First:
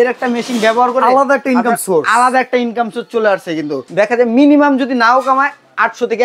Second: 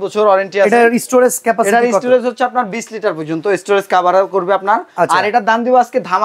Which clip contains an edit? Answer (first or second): first